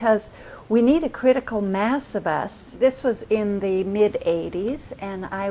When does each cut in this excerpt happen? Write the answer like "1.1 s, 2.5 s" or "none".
2.6 s

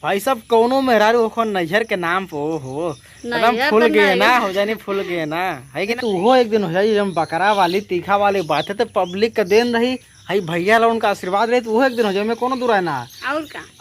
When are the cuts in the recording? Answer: 6.0 s

